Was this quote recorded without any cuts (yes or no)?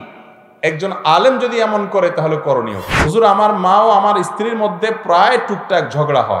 no